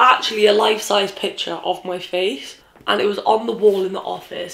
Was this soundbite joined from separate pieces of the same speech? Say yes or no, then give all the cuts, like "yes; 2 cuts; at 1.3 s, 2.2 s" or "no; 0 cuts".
no; 0 cuts